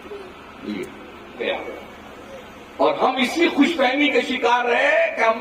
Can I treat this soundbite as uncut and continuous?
no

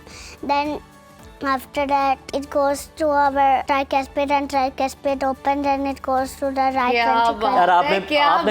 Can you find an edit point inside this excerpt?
yes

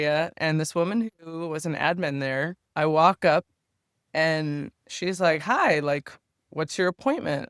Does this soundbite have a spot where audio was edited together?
yes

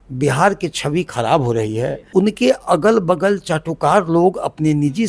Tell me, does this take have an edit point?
yes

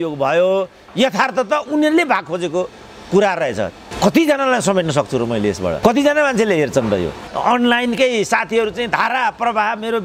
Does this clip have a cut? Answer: yes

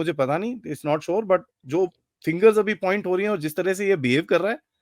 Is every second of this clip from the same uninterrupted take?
no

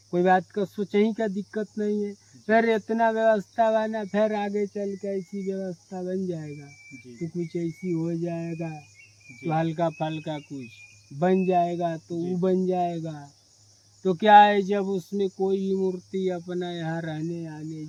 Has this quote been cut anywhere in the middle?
no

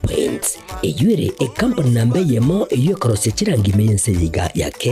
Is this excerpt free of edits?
yes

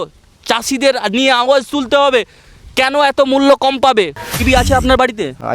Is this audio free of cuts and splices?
no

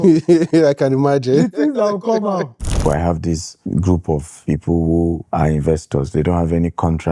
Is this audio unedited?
no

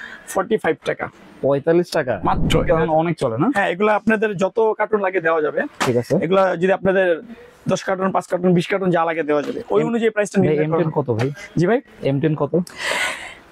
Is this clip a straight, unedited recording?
no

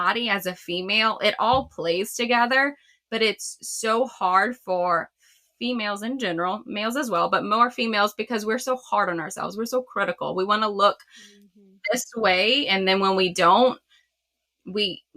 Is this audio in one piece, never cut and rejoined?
yes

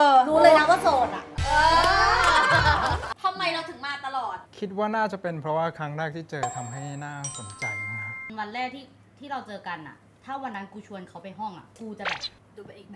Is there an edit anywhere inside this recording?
yes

